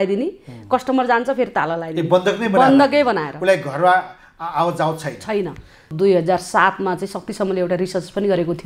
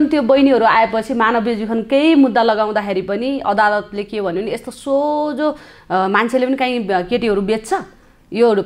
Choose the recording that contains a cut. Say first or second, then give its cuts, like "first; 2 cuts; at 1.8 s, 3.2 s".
first; 1 cut; at 5.9 s